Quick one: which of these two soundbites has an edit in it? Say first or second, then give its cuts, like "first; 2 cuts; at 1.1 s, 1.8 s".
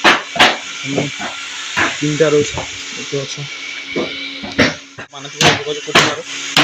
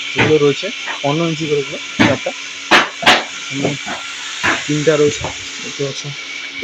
first; 1 cut; at 5.1 s